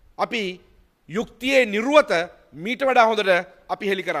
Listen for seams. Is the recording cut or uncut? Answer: uncut